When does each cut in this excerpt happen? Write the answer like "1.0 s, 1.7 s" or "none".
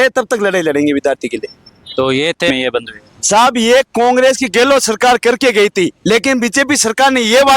2.5 s